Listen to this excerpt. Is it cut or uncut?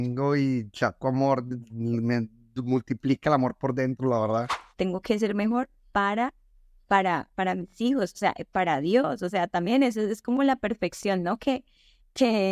cut